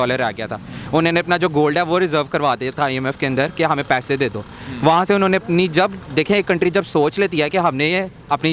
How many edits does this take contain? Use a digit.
0